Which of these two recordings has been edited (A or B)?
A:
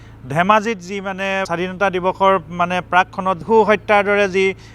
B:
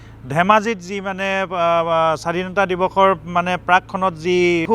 A